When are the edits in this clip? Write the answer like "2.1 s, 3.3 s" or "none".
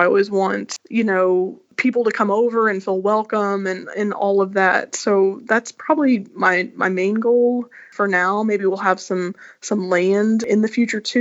none